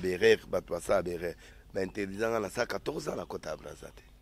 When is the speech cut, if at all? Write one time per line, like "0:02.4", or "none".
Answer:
0:01.5